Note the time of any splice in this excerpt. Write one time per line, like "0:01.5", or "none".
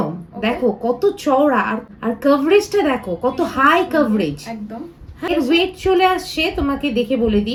none